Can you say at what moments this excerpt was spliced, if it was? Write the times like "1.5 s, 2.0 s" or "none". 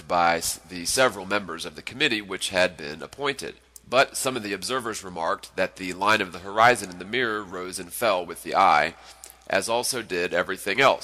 8.3 s